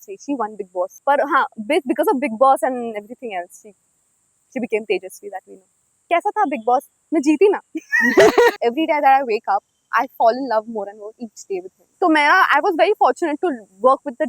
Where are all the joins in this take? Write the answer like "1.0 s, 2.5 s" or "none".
1.0 s, 6.0 s, 8.5 s, 11.8 s